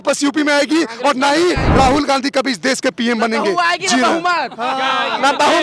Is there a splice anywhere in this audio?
yes; 1 cut; at 1.6 s

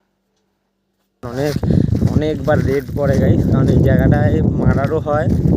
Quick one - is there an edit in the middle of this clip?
yes; 1 cut; at 1.2 s

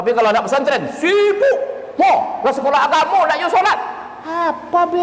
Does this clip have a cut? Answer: yes; 1 cut; at 1.8 s

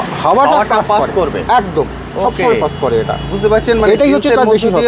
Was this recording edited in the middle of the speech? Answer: no; 0 cuts

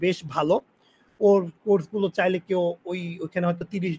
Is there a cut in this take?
no; 0 cuts

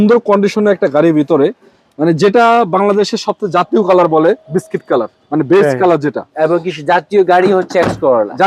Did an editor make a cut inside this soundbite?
no; 0 cuts

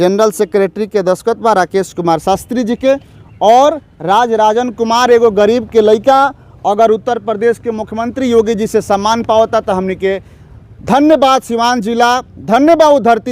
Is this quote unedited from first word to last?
yes; 0 cuts

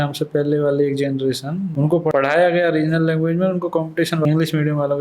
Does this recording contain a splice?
yes; 2 cuts; at 1.8 s, 4.2 s

